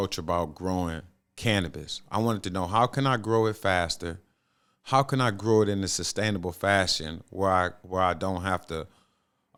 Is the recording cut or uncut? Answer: uncut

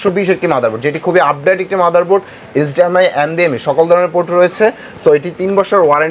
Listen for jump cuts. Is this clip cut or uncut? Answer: uncut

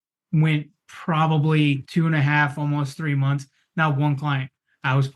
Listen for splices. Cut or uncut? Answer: cut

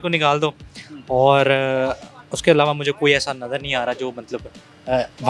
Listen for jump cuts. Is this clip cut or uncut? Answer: uncut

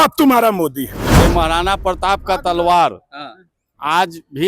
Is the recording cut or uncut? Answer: cut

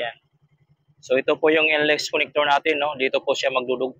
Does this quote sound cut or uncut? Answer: uncut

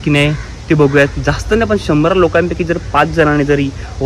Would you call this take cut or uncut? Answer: uncut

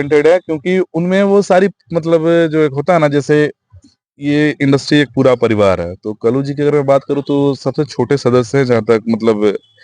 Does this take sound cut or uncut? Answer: uncut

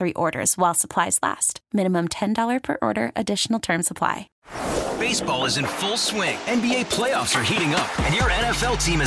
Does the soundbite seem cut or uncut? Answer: cut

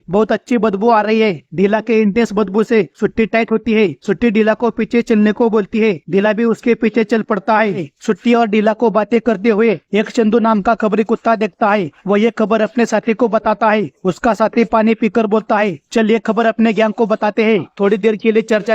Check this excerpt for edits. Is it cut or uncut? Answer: cut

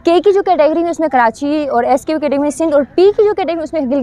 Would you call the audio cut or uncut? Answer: uncut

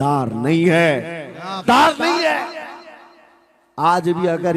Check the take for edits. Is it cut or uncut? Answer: cut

